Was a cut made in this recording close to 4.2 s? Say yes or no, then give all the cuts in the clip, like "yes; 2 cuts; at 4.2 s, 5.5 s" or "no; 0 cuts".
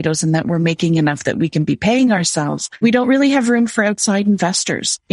no; 1 cut; at 2.8 s